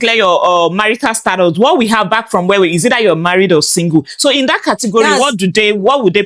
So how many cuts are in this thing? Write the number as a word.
zero